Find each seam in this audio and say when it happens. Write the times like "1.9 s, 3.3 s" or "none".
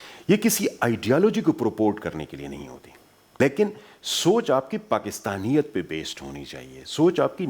3.4 s